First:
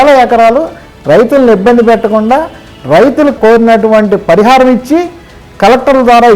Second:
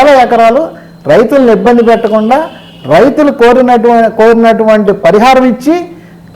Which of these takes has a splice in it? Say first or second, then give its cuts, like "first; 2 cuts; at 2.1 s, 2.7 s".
first; 1 cut; at 3.4 s